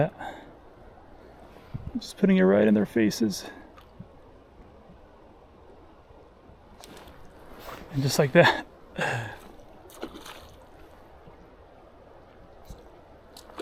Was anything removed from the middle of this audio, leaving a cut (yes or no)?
no